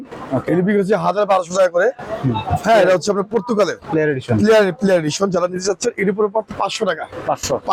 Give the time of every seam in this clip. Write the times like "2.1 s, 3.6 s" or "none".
none